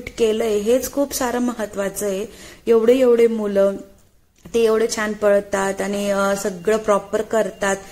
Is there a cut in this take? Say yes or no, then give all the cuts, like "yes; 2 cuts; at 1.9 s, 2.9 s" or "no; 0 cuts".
no; 0 cuts